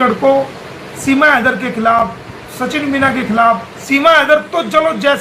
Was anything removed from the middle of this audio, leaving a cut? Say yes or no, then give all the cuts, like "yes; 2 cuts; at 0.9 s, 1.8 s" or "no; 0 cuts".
yes; 1 cut; at 3.7 s